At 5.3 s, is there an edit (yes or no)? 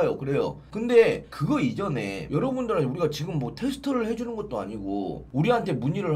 yes